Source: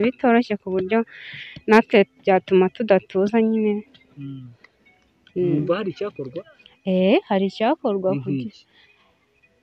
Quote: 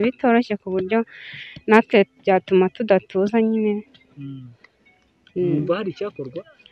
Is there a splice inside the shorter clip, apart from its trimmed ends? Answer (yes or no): no